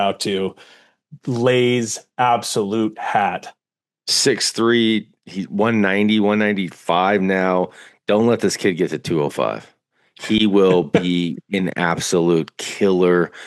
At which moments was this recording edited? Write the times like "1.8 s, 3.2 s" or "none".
4.0 s

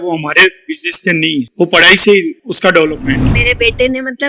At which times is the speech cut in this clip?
1.5 s, 3.0 s

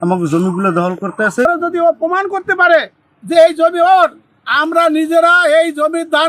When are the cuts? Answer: 1.4 s

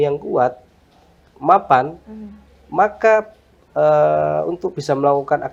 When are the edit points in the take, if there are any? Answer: none

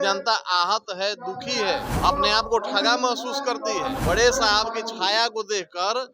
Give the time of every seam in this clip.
1.9 s, 4.0 s

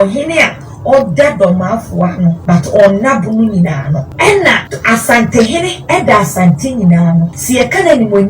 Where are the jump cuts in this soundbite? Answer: 2.4 s, 4.1 s, 4.7 s, 7.4 s

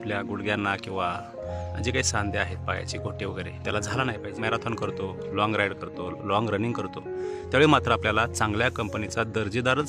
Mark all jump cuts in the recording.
4.3 s

